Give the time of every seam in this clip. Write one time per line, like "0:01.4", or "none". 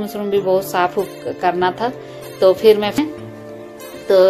0:03.0